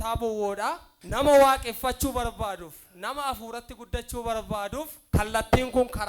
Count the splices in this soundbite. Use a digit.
2